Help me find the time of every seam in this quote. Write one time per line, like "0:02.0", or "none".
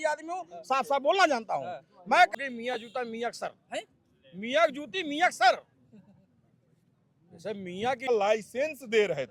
0:02.3
0:08.1